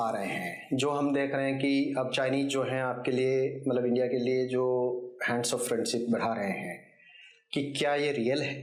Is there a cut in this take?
no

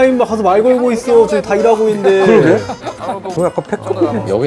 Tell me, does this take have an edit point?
yes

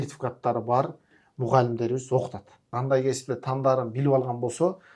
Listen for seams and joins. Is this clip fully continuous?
no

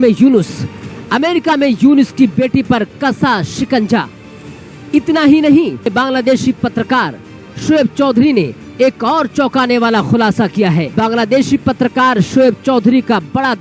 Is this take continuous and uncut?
no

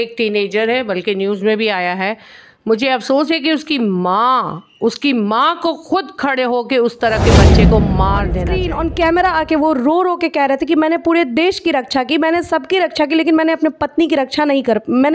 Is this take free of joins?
no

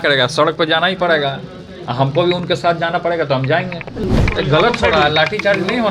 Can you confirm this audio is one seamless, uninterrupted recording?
no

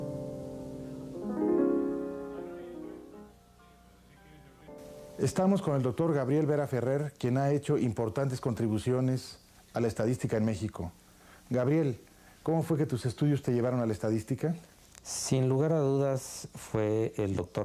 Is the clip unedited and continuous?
yes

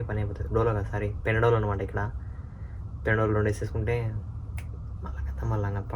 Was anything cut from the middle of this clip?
no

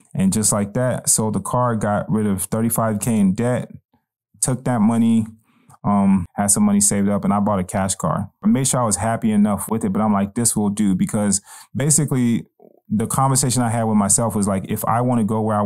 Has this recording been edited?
yes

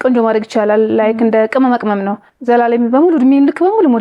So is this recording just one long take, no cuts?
no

